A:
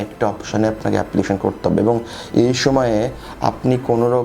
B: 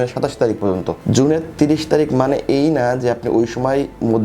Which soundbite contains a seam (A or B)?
B